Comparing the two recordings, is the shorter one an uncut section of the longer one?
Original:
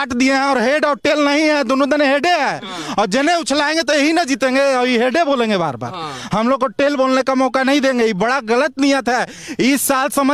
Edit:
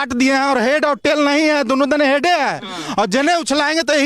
yes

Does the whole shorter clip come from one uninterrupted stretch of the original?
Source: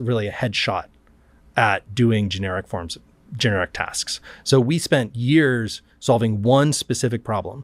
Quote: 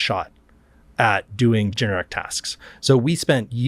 no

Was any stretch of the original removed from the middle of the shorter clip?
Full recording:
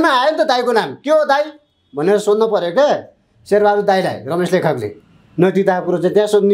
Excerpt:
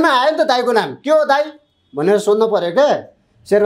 no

